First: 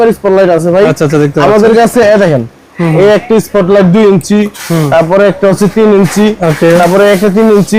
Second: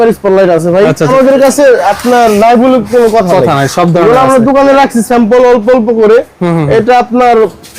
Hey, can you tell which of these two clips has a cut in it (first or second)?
second